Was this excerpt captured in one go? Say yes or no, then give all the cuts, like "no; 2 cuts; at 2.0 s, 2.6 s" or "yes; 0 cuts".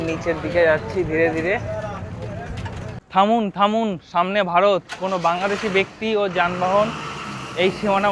no; 1 cut; at 3.0 s